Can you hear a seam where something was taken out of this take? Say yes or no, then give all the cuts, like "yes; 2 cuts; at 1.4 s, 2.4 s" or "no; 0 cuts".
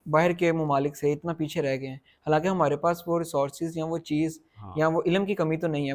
no; 0 cuts